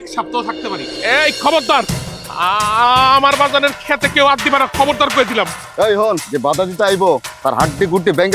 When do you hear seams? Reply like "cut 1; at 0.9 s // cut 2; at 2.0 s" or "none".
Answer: cut 1; at 1.0 s